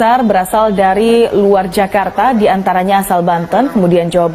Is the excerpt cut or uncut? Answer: uncut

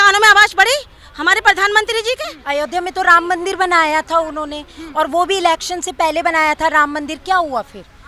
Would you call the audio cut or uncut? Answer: cut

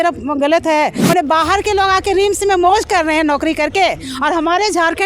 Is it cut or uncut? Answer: cut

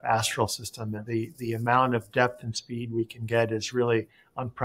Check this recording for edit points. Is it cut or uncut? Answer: uncut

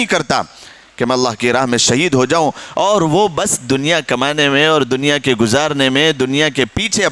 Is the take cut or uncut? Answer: uncut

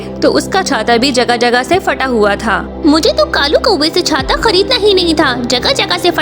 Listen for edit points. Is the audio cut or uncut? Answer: uncut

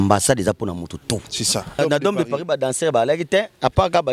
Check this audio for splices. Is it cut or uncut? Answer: cut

